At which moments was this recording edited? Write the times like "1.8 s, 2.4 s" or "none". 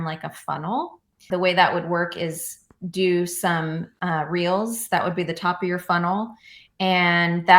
1.2 s